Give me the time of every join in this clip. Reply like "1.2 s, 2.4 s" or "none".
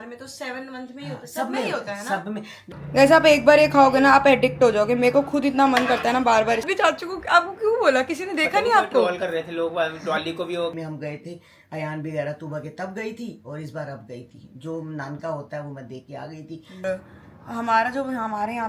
2.6 s, 6.8 s, 10.7 s, 16.8 s